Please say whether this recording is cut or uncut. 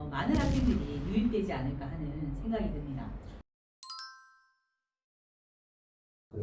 uncut